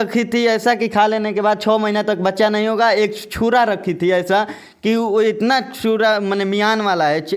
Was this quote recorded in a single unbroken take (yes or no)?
yes